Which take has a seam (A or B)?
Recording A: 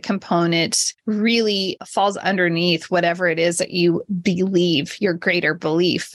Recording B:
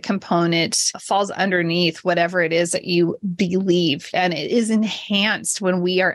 B